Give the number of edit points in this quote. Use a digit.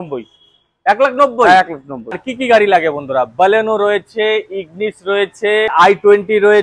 2